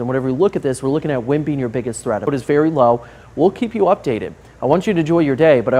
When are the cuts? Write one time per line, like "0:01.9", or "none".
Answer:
0:02.3